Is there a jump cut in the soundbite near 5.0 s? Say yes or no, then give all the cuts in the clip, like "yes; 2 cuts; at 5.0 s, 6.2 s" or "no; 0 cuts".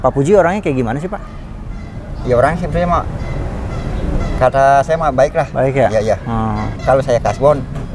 no; 1 cut; at 6.7 s